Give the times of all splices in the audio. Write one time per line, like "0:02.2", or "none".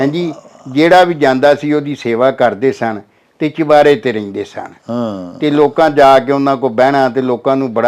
none